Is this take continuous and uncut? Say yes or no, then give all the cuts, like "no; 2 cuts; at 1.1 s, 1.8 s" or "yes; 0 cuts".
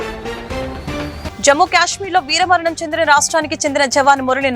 no; 1 cut; at 1.3 s